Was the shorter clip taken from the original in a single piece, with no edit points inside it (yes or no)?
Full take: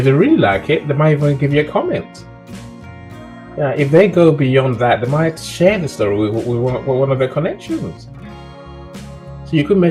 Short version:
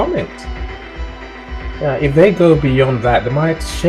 yes